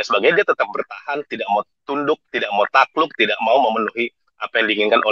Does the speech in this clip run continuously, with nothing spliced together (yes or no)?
no